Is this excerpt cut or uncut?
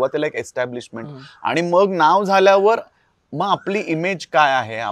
uncut